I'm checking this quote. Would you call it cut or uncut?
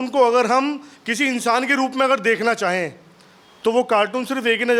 uncut